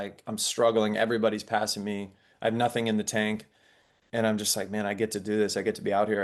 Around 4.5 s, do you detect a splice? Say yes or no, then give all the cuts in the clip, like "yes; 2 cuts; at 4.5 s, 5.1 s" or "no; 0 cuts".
no; 0 cuts